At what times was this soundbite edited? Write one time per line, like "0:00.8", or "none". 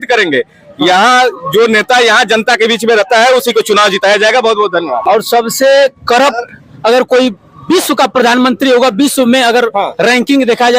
0:05.0